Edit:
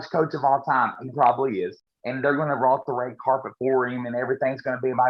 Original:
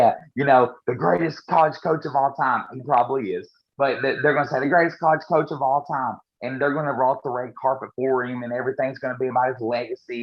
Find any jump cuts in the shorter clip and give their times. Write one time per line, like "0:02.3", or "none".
0:01.9